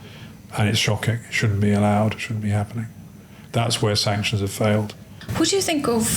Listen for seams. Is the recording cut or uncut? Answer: uncut